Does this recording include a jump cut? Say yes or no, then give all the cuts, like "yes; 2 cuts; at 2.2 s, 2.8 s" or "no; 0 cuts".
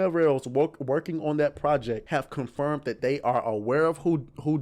yes; 1 cut; at 2.0 s